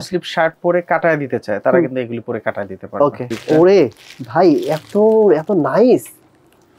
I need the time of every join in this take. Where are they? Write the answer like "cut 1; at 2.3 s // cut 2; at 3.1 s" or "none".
cut 1; at 3.3 s